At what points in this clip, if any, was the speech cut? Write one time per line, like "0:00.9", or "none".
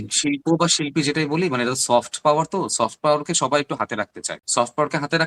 none